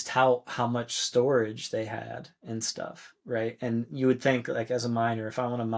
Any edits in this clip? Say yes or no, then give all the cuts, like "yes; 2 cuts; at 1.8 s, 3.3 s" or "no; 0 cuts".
no; 0 cuts